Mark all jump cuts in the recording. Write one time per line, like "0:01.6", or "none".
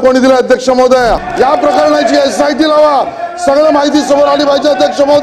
0:01.2